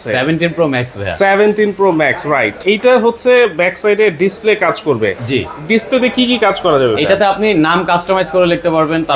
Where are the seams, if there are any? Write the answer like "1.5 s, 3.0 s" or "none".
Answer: 2.6 s